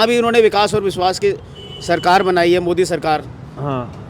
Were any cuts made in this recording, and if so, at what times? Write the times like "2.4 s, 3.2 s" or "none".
none